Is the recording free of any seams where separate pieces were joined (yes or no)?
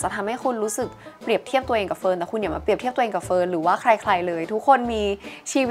yes